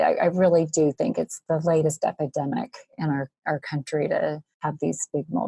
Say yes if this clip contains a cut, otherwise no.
yes